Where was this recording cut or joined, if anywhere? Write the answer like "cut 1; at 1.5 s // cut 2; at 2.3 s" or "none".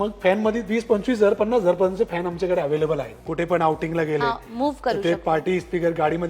cut 1; at 3.2 s